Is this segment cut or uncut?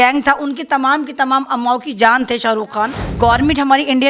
cut